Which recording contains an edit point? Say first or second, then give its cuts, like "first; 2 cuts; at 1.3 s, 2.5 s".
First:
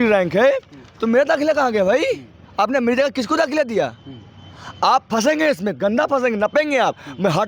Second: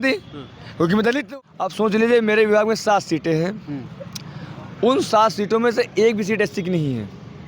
second; 1 cut; at 1.3 s